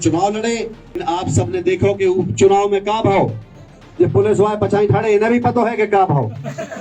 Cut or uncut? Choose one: cut